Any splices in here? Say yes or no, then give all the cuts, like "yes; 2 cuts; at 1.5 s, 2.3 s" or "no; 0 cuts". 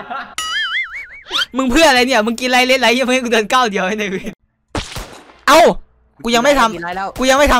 yes; 1 cut; at 4.4 s